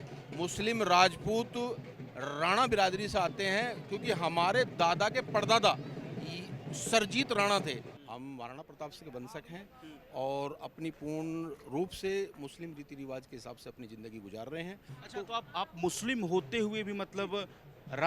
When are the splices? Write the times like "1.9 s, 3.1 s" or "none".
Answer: 8.0 s, 14.9 s